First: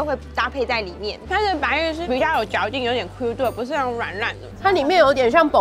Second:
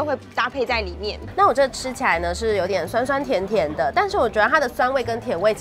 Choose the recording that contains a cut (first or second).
first